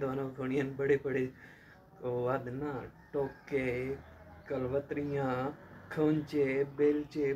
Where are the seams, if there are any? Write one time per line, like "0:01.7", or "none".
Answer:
none